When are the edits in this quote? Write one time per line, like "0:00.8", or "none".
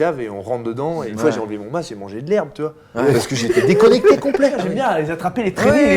0:01.1
0:04.6